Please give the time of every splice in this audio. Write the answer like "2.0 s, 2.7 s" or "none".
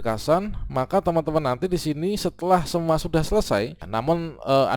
3.8 s